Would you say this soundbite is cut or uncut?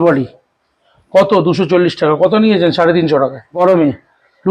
cut